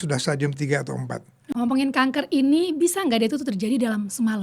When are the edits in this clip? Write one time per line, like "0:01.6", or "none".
0:01.5